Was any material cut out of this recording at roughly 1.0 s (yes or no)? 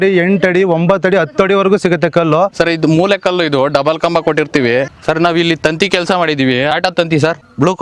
no